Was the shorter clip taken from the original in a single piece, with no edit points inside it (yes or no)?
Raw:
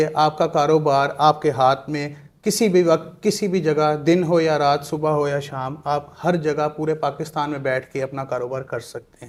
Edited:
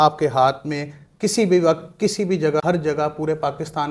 no